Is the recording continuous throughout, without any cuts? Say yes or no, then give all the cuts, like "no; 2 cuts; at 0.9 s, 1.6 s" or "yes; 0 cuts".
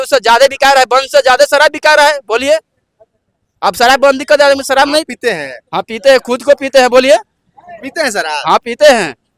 yes; 0 cuts